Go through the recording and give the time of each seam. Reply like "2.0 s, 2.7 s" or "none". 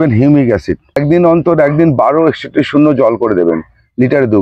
1.0 s